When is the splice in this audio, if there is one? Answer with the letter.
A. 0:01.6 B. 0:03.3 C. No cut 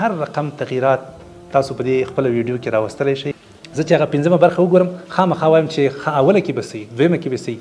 B